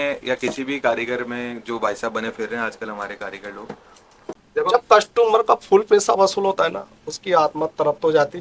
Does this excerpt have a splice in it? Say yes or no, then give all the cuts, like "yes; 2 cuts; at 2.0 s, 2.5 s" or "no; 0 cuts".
yes; 1 cut; at 4.4 s